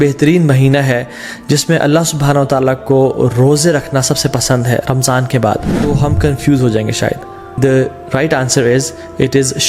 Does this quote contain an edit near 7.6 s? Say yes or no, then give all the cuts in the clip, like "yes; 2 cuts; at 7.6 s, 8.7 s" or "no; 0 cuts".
yes; 2 cuts; at 5.7 s, 7.6 s